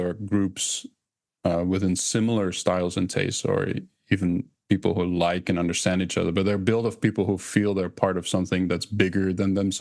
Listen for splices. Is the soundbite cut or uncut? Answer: uncut